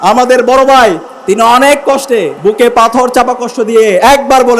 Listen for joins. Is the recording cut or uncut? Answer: cut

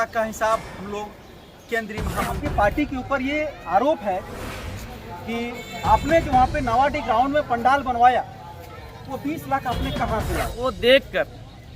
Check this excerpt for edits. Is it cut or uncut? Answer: cut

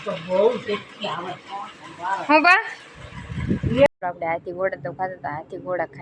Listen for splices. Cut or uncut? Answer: cut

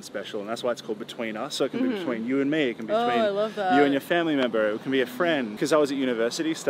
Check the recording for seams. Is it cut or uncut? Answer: cut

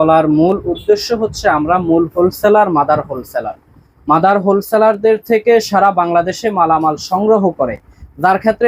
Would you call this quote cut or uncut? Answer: uncut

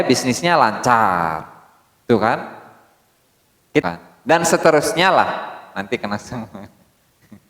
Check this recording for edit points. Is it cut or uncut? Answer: cut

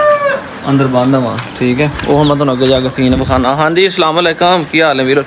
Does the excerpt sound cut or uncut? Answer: uncut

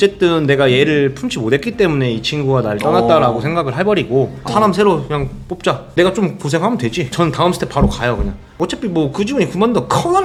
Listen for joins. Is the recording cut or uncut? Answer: uncut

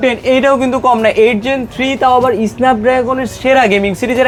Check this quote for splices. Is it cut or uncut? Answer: uncut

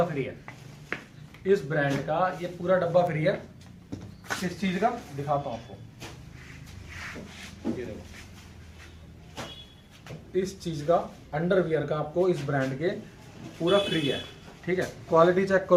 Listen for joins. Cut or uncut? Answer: uncut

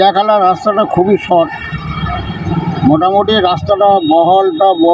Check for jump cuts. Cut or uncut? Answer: uncut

